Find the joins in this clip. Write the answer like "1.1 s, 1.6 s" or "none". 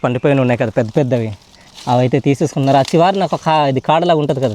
none